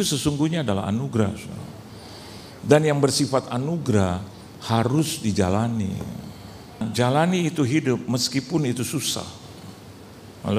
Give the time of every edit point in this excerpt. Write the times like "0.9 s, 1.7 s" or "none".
6.8 s